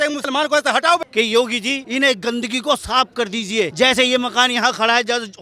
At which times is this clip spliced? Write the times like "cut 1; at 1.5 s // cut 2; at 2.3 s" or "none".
cut 1; at 1.1 s // cut 2; at 1.8 s // cut 3; at 3.7 s